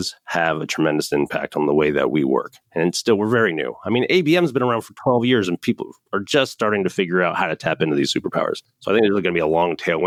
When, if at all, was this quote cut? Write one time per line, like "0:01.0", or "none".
none